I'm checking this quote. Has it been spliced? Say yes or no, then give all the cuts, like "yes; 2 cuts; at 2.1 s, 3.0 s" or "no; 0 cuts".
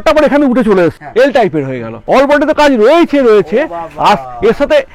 yes; 2 cuts; at 1.0 s, 1.9 s